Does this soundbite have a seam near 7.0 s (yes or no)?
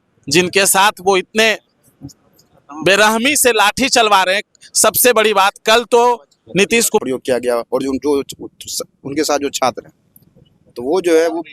yes